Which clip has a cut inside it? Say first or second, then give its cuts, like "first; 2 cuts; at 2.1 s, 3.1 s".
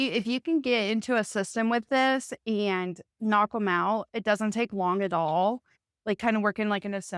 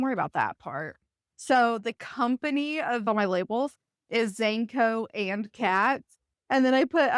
second; 2 cuts; at 1.2 s, 3.0 s